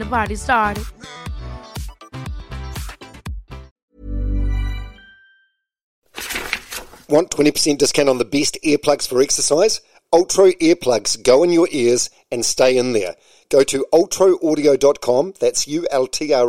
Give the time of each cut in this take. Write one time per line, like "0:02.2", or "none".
0:03.7
0:06.1